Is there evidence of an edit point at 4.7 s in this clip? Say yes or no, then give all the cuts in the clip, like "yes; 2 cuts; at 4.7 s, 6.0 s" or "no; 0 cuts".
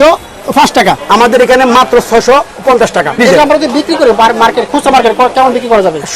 no; 2 cuts; at 1.0 s, 3.2 s